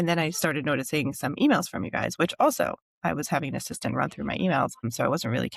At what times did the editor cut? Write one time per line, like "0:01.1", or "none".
none